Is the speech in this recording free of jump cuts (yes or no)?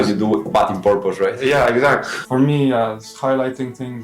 no